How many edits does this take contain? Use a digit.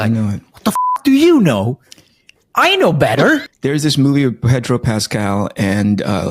1